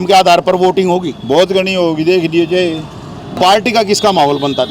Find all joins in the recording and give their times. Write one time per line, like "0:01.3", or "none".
0:03.3

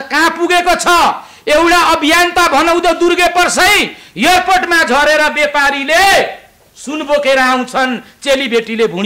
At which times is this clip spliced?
none

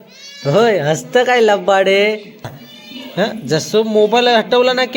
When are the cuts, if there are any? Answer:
0:02.6

